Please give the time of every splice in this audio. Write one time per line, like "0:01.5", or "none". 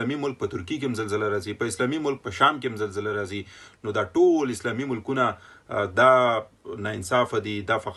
none